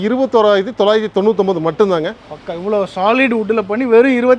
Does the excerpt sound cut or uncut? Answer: uncut